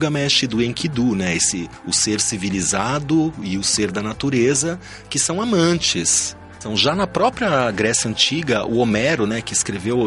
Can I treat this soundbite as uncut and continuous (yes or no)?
no